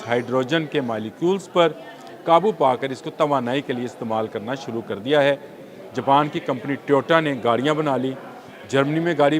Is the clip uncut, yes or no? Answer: yes